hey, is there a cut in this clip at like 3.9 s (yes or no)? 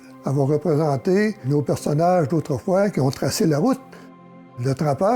no